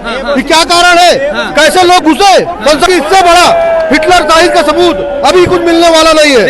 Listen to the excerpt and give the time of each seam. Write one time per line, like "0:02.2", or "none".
0:02.9